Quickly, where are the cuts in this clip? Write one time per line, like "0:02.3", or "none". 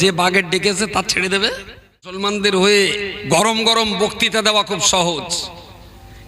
0:02.2